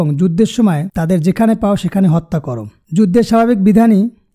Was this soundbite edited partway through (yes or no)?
no